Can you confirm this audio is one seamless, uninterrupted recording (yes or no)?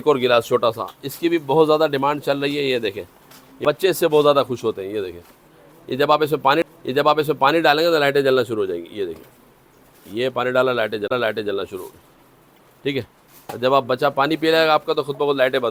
yes